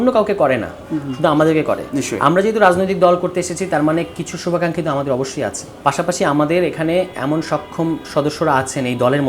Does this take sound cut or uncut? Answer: cut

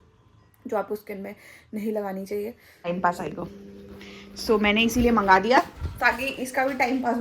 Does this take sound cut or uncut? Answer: cut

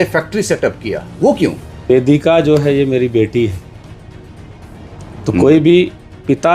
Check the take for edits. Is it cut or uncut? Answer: cut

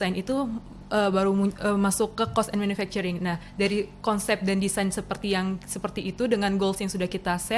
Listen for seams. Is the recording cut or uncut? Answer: uncut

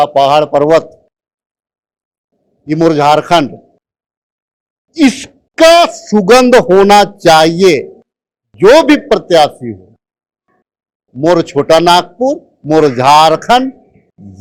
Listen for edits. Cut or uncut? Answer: uncut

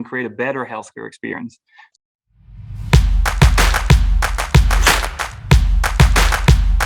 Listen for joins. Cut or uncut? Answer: cut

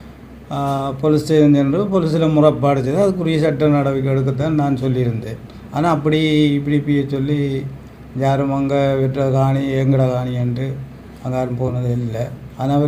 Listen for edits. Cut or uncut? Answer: uncut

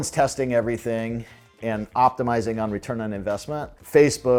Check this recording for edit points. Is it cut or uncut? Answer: uncut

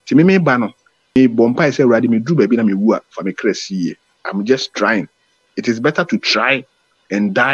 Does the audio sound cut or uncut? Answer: cut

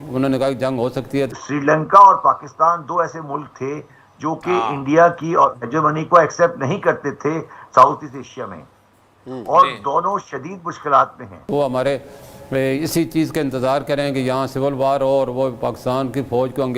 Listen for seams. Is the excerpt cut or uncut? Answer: cut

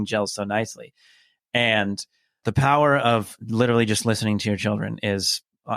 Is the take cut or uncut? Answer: cut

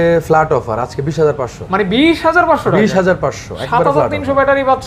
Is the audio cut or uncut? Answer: uncut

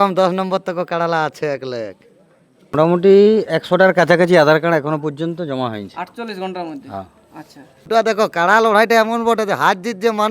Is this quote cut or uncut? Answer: cut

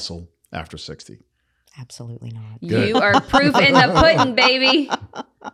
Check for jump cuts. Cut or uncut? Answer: uncut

